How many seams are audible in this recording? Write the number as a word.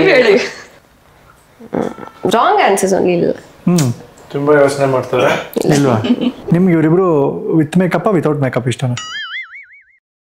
one